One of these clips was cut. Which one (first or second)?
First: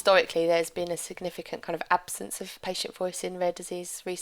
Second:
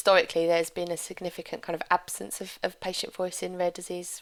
first